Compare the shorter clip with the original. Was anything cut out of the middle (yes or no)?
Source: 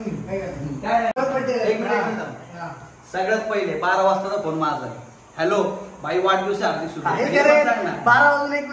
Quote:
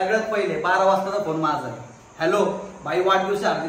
no